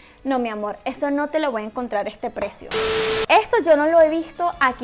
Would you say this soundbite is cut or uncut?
cut